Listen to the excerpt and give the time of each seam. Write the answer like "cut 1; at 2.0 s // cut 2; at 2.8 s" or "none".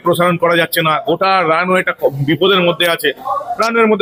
none